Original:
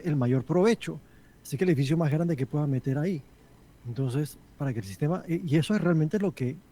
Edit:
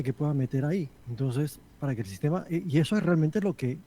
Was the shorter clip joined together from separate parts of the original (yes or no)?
yes